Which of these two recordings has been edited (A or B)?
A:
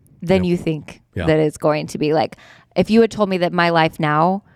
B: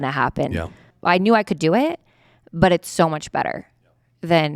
B